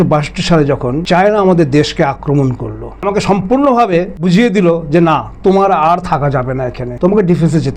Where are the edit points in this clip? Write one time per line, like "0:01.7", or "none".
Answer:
0:01.0
0:03.0
0:04.2
0:06.8